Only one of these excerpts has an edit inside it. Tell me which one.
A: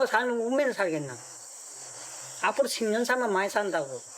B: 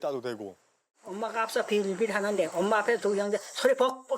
B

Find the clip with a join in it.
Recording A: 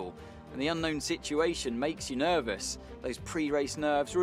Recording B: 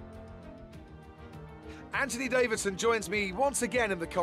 B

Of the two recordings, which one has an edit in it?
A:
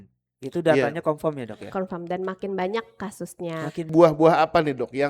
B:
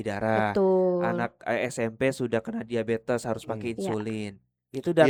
A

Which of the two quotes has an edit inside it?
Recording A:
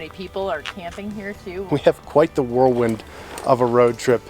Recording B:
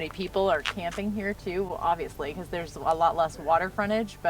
A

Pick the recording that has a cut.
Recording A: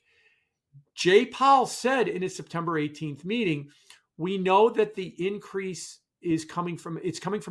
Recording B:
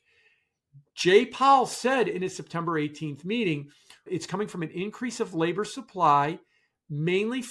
B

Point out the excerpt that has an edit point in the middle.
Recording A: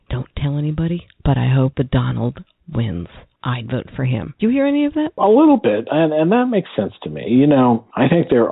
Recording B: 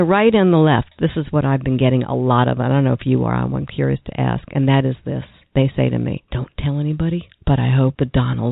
A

